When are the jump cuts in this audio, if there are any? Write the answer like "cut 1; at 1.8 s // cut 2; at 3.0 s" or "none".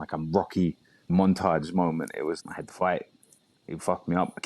cut 1; at 1.1 s // cut 2; at 2.4 s

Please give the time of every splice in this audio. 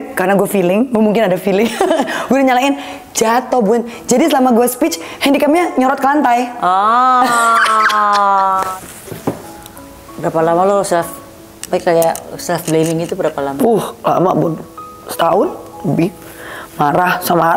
cut 1; at 8.7 s

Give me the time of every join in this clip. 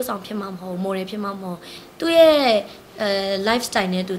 cut 1; at 1.8 s

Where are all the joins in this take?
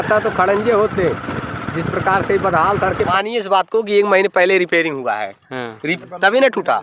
cut 1; at 3.1 s // cut 2; at 5.8 s

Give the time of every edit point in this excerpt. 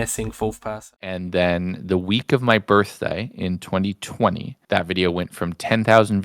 cut 1; at 1.1 s

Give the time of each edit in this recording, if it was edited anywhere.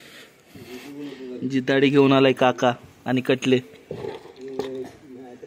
none

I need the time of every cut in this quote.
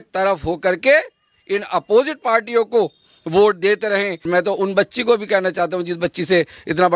cut 1; at 4.3 s

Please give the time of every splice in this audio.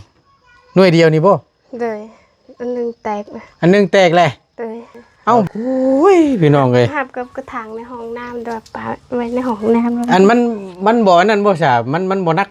cut 1; at 5.5 s

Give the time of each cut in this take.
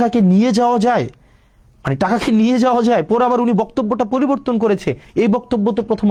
none

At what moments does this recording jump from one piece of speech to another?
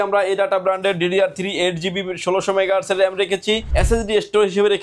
cut 1; at 3.7 s

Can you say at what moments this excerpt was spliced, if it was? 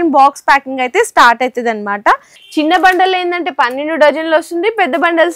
cut 1; at 2.3 s

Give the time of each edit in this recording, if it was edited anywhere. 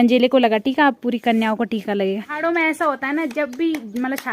cut 1; at 2.3 s

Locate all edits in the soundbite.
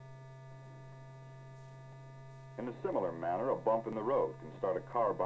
none

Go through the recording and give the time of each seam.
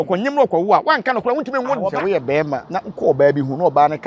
cut 1; at 1.9 s // cut 2; at 2.7 s

